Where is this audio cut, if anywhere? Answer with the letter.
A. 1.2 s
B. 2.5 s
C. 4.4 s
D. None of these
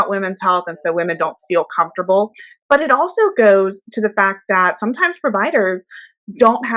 B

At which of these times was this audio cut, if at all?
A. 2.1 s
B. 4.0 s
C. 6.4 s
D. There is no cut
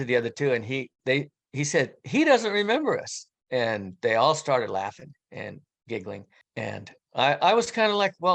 C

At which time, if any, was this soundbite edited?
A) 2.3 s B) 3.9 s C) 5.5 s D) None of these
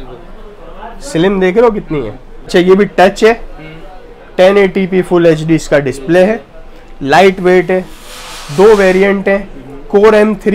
A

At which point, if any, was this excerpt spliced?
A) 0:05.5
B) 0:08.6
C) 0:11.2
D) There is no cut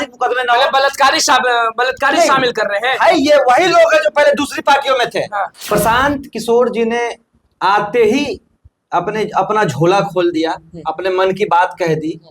A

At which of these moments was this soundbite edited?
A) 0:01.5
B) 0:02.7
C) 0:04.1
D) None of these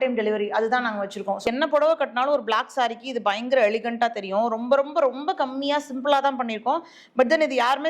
A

